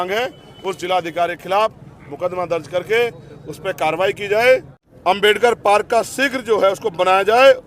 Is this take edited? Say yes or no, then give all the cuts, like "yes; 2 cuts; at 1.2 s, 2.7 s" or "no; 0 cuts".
yes; 1 cut; at 4.7 s